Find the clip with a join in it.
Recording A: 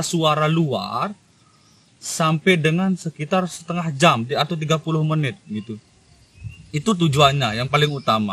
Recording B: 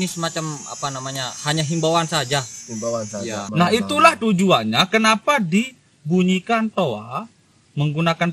B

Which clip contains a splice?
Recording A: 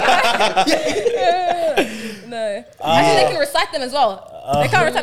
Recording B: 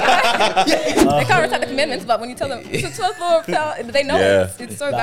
B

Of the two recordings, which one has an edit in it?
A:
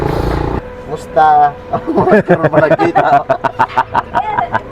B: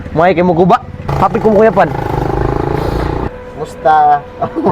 B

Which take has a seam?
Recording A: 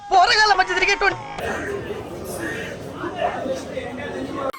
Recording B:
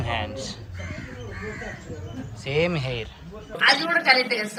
A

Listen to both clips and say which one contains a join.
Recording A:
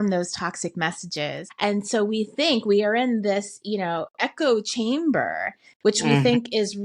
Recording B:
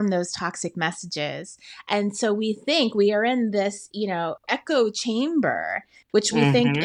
A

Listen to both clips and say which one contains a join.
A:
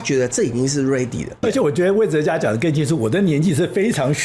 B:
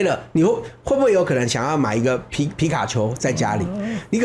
A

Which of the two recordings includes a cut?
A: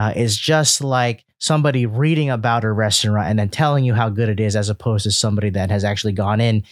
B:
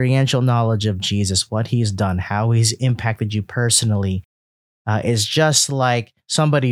B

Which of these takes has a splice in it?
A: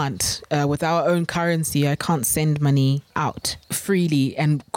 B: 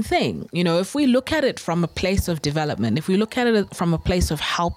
A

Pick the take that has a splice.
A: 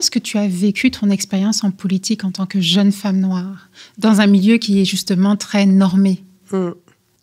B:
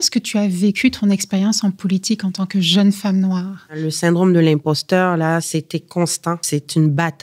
B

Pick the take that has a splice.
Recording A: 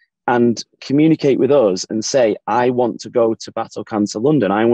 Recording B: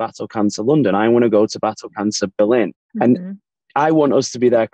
B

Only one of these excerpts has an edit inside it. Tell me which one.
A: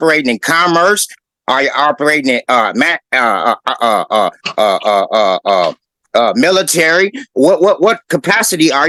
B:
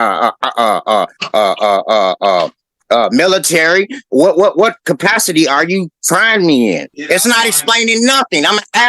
B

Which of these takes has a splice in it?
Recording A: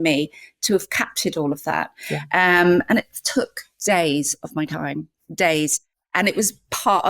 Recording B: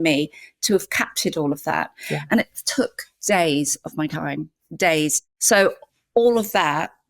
B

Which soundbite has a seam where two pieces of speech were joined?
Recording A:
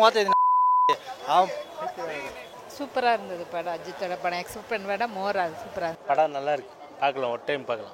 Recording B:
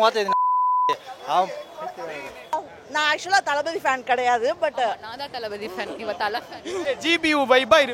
B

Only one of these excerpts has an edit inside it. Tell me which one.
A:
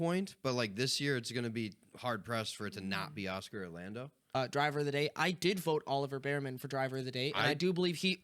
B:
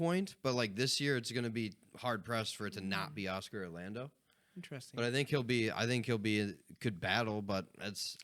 A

